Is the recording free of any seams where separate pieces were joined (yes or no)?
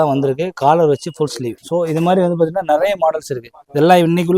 yes